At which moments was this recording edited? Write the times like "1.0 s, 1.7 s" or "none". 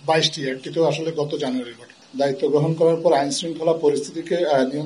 1.9 s